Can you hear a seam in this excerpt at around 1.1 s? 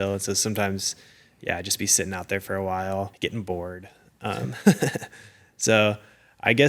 no; 1 cut; at 3.1 s

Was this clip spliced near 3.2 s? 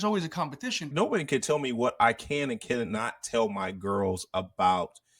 no; 1 cut; at 0.9 s

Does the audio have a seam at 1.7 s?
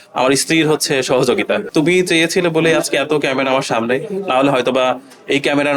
yes; 1 cut; at 1.7 s

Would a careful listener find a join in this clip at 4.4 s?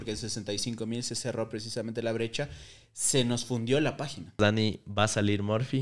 yes; 1 cut; at 4.4 s

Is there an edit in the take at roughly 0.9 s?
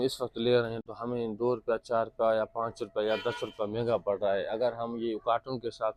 no; 0 cuts

